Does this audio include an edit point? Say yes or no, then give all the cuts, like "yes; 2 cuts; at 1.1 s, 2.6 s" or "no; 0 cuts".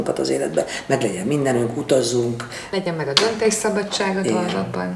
yes; 1 cut; at 2.5 s